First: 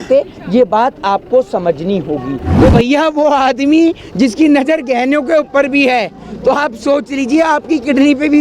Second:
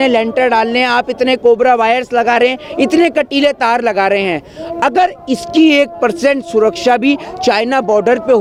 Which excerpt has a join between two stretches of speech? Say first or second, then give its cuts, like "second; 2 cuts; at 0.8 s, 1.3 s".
first; 1 cut; at 2.4 s